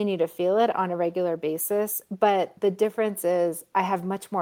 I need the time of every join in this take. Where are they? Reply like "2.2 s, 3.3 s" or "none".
2.5 s